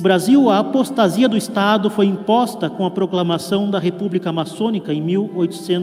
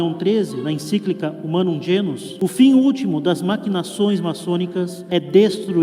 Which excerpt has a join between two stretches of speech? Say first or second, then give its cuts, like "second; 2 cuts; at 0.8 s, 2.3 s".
second; 2 cuts; at 2.3 s, 5.0 s